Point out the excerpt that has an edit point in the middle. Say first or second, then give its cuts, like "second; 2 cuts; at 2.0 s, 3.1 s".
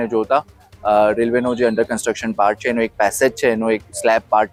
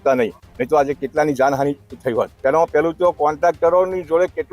second; 1 cut; at 2.3 s